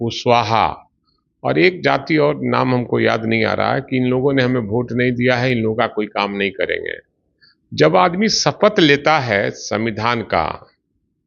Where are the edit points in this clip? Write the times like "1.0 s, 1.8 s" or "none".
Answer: none